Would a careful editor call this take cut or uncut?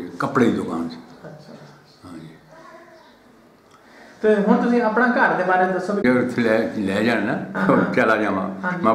cut